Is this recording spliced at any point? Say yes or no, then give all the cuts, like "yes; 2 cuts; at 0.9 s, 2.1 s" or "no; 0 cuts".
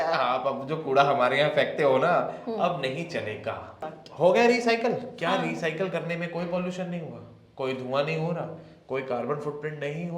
yes; 1 cut; at 3.8 s